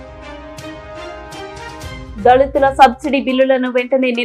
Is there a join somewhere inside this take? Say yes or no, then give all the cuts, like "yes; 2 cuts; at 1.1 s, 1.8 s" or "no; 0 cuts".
yes; 2 cuts; at 0.7 s, 2.0 s